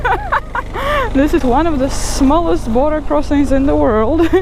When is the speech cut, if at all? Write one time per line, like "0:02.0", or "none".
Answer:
0:01.4